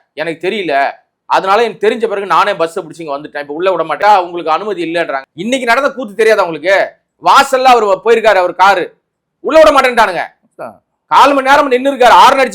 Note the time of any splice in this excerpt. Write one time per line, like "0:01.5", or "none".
0:04.0
0:05.2